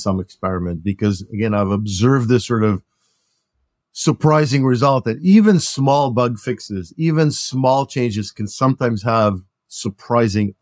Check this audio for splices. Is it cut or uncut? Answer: uncut